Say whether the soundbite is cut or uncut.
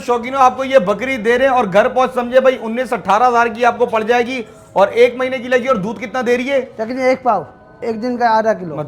uncut